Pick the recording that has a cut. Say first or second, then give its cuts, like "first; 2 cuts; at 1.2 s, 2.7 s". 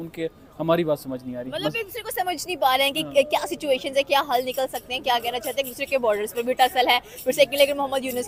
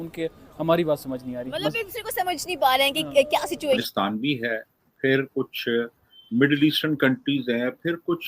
second; 1 cut; at 3.8 s